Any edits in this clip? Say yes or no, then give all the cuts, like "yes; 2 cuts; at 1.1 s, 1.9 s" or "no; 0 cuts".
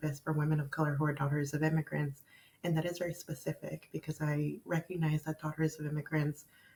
no; 0 cuts